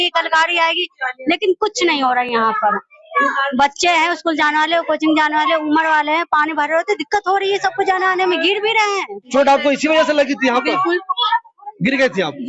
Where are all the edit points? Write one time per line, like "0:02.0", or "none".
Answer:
none